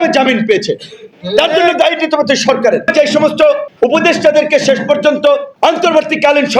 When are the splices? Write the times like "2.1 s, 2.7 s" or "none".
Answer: 2.9 s, 3.7 s, 5.5 s